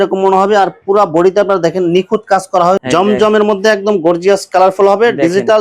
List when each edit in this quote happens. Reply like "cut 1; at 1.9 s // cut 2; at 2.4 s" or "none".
cut 1; at 2.8 s